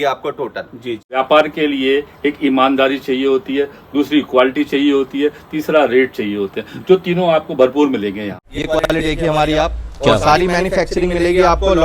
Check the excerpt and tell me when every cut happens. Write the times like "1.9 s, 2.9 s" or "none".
1.0 s, 8.5 s